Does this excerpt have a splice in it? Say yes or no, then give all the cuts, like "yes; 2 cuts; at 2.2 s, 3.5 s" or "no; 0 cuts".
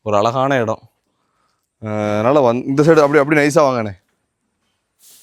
no; 0 cuts